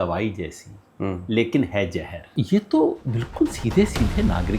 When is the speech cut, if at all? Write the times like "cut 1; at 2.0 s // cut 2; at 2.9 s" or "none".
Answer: cut 1; at 2.3 s

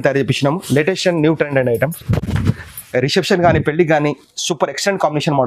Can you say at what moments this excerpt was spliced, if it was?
none

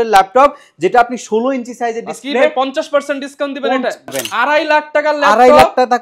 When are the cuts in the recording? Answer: cut 1; at 4.1 s

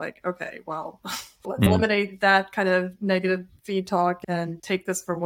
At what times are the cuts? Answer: cut 1; at 1.7 s // cut 2; at 4.2 s

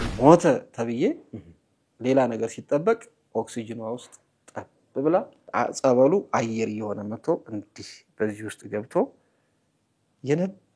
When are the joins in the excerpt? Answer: cut 1; at 5.4 s

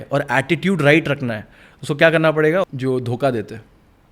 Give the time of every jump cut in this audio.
cut 1; at 2.7 s

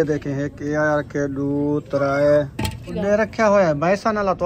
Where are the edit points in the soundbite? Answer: cut 1; at 2.9 s

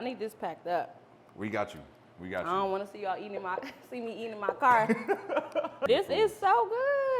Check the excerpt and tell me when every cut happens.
cut 1; at 5.8 s

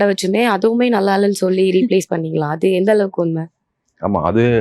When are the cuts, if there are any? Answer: none

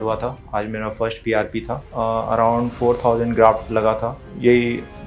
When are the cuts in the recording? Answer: cut 1; at 4.2 s

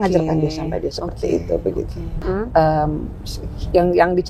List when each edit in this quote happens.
cut 1; at 2.2 s

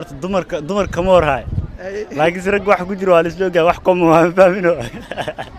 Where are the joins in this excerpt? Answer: none

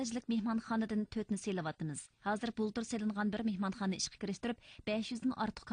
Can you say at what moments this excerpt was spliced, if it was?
cut 1; at 4.2 s

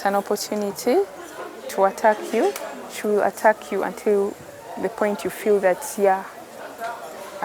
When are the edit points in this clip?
none

